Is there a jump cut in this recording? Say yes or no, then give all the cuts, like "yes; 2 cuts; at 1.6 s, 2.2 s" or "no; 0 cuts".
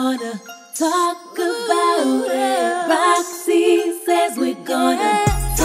no; 0 cuts